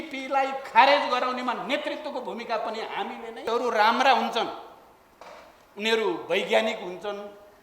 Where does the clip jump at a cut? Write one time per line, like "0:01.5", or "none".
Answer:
0:03.4